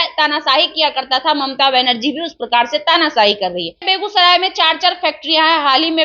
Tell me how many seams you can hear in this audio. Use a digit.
1